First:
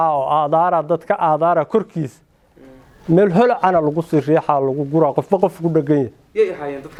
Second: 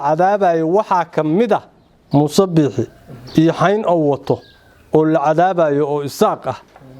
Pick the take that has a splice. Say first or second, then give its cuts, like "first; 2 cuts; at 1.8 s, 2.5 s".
second; 1 cut; at 2.0 s